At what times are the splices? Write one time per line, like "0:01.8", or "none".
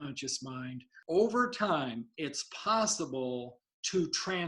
0:01.0